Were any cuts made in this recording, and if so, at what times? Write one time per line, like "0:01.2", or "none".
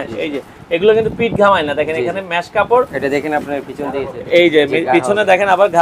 none